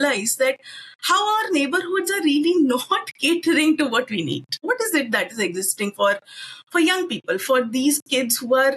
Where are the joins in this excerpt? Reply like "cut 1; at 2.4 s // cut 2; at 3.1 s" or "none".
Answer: cut 1; at 4.6 s

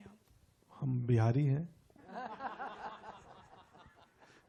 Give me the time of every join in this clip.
none

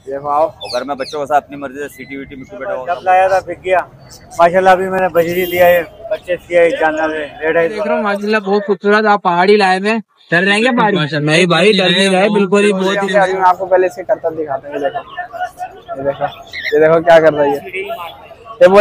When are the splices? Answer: cut 1; at 2.9 s // cut 2; at 8.1 s // cut 3; at 13.0 s

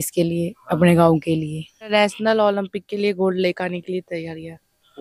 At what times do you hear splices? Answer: cut 1; at 1.9 s

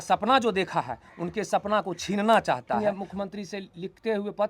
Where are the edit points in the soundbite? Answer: cut 1; at 2.8 s

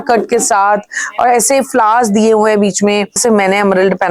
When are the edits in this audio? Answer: cut 1; at 3.2 s

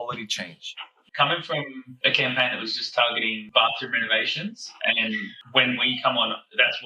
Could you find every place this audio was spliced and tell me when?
cut 1; at 1.0 s // cut 2; at 1.9 s // cut 3; at 3.4 s

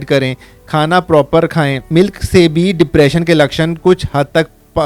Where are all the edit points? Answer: cut 1; at 1.8 s

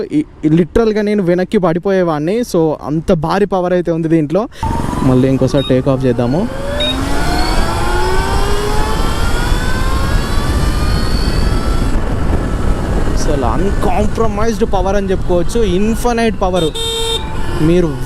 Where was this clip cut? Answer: cut 1; at 4.7 s

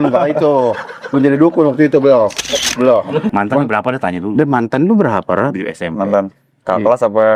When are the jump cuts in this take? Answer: cut 1; at 3.3 s

